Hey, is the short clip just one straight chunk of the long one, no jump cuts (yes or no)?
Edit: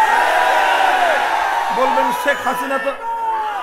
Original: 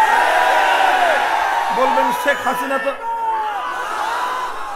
yes